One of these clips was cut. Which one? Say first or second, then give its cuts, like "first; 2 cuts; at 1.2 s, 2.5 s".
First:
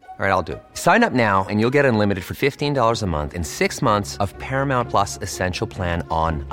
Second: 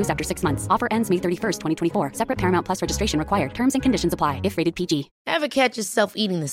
second; 1 cut; at 5.1 s